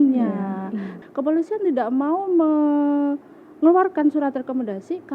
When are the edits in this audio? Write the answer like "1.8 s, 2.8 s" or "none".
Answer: 0.9 s

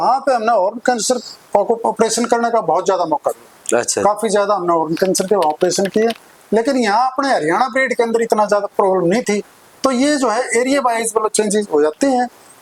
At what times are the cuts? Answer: none

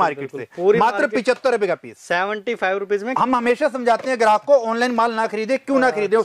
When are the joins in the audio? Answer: 3.1 s

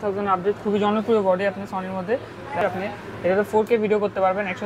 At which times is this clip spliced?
2.6 s

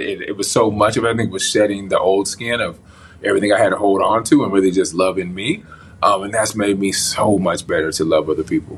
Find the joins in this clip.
none

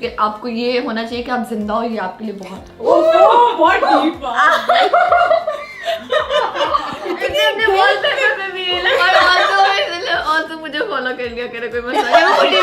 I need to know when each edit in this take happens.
none

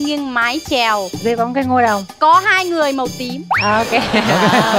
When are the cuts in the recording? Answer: 1.1 s, 3.4 s

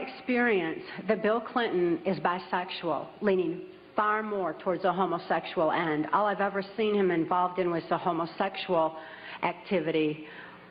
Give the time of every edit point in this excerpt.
none

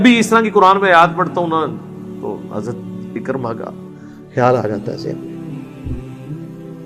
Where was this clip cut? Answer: 5.1 s

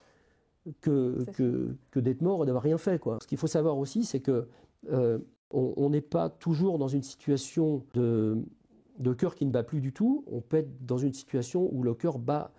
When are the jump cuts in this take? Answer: 3.2 s, 5.4 s, 7.9 s

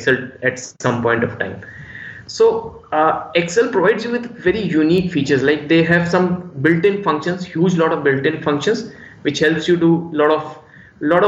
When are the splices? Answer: none

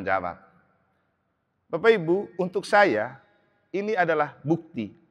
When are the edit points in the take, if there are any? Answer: none

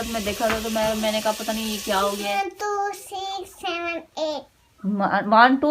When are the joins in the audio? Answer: 2.4 s

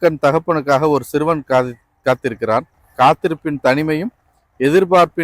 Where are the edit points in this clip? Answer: 2.8 s

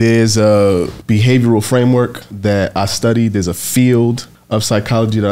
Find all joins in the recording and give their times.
1.0 s, 2.2 s, 4.3 s

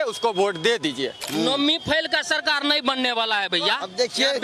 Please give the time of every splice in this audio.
1.2 s

